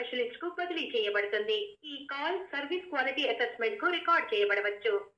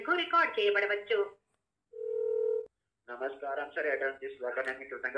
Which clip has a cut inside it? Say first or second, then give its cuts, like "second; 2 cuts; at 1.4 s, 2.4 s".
second; 1 cut; at 2.6 s